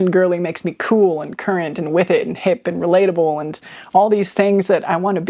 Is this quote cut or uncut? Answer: uncut